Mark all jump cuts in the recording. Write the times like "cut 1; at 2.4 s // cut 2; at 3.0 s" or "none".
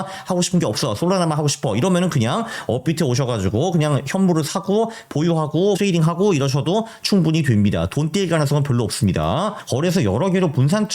cut 1; at 5.8 s // cut 2; at 9.6 s